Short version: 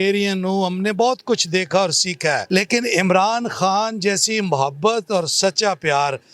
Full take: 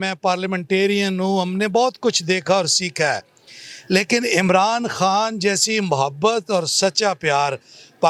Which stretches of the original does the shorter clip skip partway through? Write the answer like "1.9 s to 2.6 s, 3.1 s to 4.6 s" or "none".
3.2 s to 3.8 s